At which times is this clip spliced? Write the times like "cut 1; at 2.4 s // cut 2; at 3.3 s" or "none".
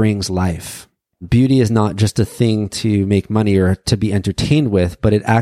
cut 1; at 1.2 s